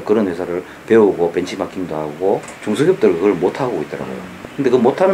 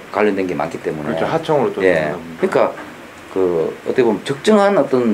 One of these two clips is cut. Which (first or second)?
first